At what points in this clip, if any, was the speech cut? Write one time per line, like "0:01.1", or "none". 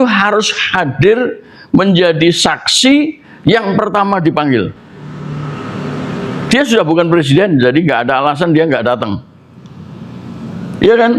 none